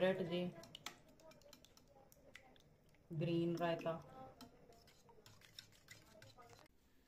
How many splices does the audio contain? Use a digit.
0